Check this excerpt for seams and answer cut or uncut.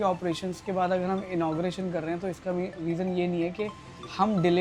uncut